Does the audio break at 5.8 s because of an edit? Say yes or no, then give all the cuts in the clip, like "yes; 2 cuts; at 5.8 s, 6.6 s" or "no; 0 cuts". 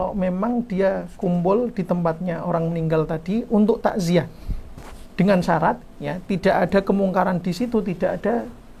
yes; 1 cut; at 5.8 s